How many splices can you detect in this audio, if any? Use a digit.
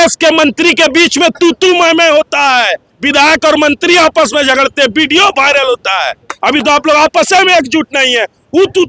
2